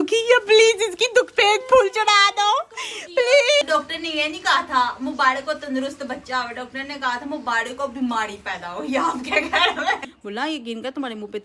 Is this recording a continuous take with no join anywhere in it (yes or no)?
no